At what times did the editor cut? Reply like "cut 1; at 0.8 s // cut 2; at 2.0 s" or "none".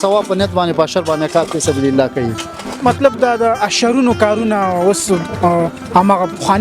cut 1; at 2.7 s